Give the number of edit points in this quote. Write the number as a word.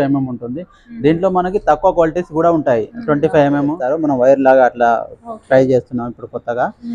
one